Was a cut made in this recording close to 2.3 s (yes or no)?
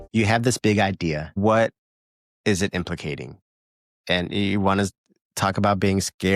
no